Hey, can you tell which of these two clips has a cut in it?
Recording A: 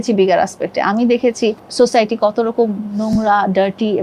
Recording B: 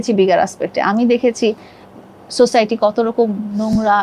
A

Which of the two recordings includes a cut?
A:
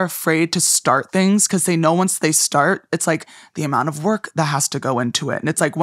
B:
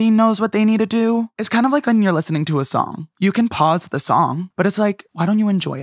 B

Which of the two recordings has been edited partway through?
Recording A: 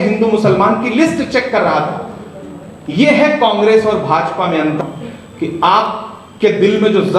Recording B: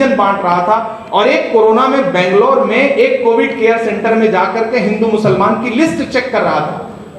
A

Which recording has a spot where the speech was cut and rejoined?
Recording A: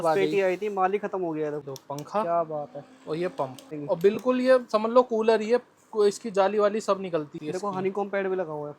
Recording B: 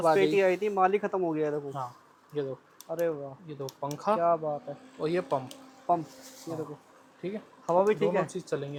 A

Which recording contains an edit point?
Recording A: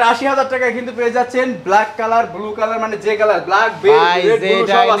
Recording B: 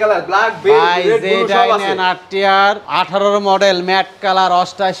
B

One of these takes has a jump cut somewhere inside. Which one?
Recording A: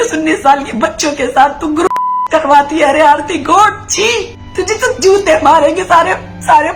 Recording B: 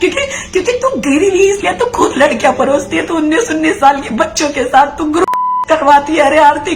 A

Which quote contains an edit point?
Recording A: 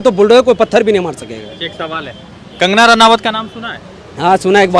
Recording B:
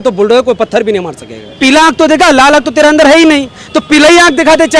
B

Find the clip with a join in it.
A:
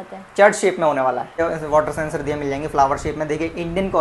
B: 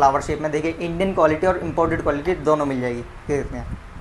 A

